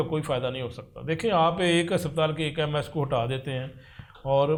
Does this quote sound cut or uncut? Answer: uncut